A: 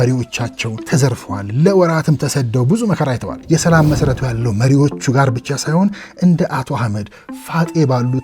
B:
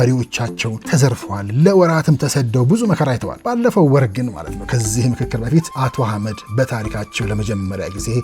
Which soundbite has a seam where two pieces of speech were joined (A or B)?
A